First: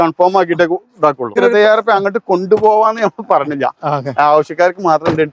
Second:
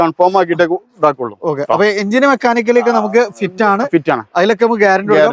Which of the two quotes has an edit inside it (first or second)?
first